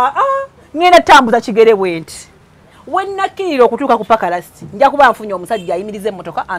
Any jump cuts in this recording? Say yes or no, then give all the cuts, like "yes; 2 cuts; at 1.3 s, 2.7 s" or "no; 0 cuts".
no; 0 cuts